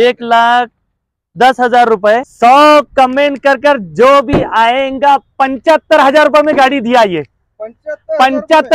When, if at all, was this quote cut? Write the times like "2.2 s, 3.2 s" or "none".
none

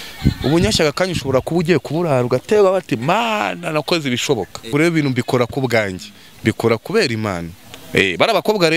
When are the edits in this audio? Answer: 4.7 s

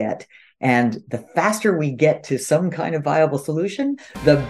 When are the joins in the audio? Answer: none

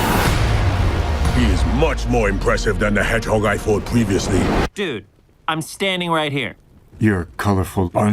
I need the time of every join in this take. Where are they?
6.7 s

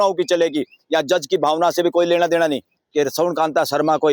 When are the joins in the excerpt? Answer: 2.8 s

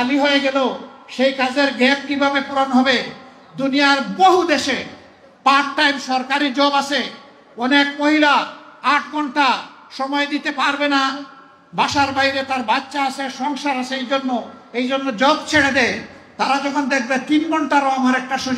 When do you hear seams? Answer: none

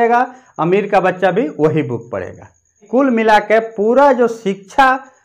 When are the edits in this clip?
2.8 s

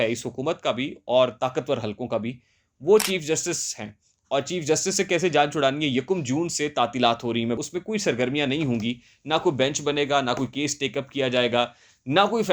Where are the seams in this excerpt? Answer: 7.6 s

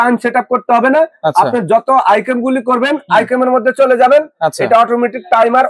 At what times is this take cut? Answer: none

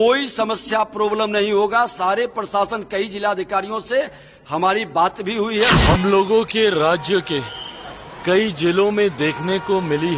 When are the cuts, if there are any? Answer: 5.7 s

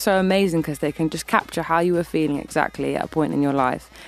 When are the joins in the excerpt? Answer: 1.2 s

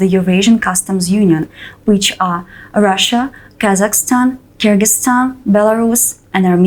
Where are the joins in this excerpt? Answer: none

